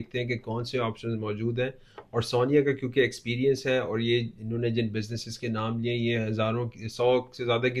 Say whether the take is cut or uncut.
uncut